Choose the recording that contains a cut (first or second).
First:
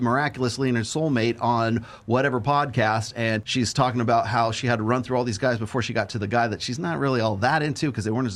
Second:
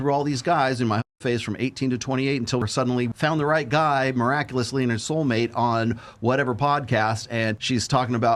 second